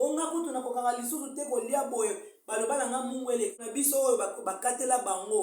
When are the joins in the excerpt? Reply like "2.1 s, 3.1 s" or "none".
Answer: 3.6 s